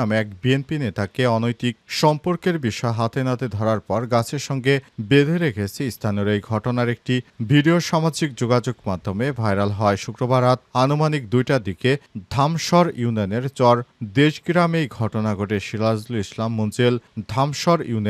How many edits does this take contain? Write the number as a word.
zero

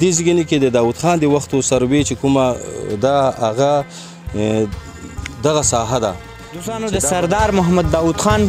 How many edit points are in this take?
one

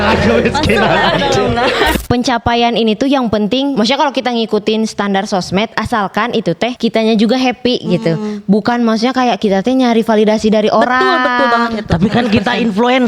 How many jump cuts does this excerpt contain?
three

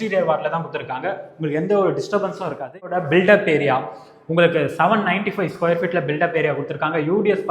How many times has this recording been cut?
one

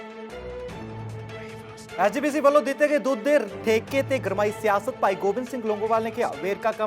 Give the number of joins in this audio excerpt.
one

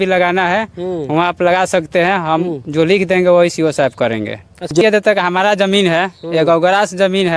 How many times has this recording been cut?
one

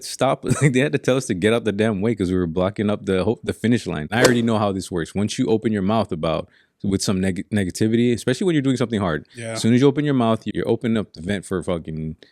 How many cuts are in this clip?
two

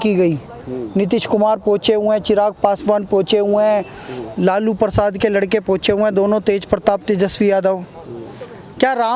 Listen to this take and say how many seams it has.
zero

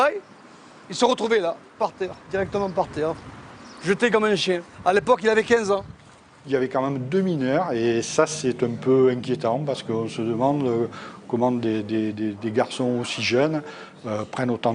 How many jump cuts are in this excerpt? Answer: one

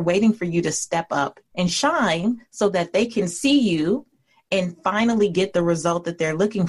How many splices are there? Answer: one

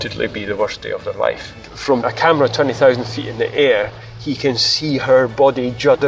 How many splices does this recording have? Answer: one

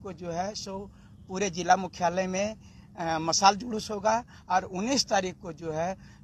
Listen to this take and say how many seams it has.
zero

